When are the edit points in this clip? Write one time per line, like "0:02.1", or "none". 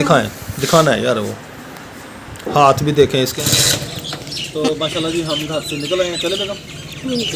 0:03.3